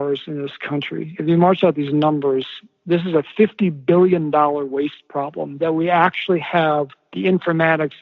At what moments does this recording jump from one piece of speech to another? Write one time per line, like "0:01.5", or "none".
0:07.0